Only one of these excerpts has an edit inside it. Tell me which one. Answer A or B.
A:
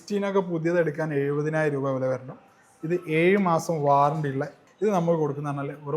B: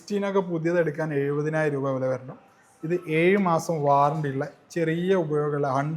A